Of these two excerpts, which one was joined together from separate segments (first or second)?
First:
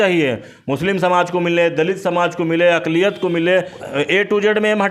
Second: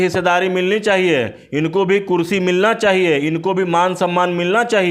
first